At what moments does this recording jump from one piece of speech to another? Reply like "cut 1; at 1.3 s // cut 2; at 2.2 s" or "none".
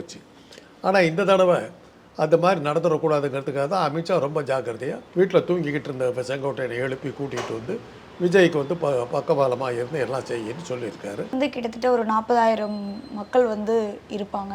cut 1; at 5.0 s // cut 2; at 11.3 s